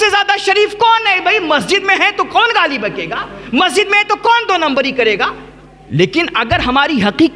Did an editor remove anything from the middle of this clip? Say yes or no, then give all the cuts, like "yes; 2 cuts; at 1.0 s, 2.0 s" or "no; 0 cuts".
no; 0 cuts